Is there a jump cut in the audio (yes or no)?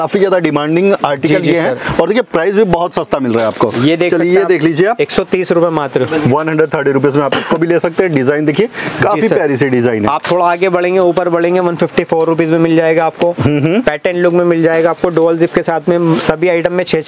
no